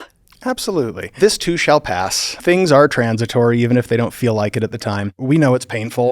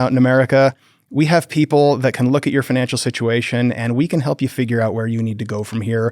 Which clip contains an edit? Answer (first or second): first